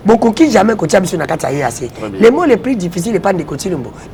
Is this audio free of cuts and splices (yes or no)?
yes